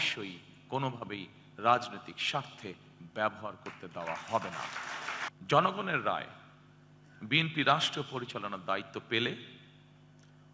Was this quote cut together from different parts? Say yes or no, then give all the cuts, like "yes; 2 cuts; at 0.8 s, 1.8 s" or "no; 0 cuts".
yes; 1 cut; at 5.3 s